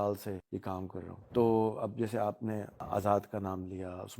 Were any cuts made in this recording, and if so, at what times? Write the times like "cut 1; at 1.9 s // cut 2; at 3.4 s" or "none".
cut 1; at 1.0 s // cut 2; at 2.8 s